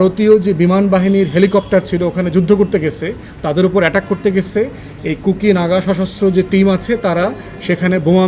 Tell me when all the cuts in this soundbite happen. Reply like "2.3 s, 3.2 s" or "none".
none